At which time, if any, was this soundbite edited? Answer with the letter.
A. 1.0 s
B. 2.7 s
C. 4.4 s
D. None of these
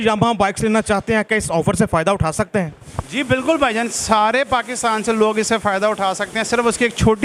D